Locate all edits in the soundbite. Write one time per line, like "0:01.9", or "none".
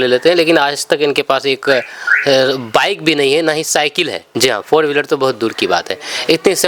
0:04.2